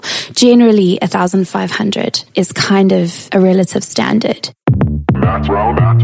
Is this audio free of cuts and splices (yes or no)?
no